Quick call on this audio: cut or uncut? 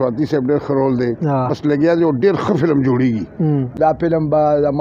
cut